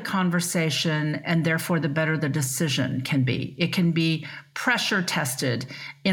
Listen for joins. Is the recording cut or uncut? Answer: uncut